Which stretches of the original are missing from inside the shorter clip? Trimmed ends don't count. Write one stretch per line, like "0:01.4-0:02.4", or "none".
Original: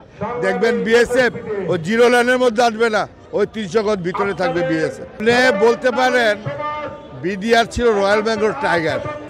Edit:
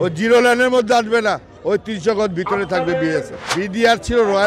0:05.1-0:07.1